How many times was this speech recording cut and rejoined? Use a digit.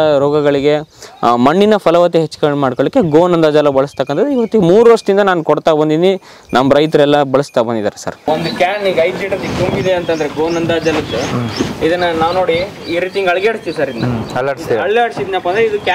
1